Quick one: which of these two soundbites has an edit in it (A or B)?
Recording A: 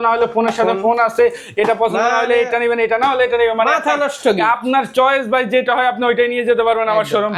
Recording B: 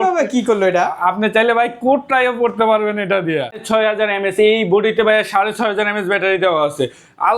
B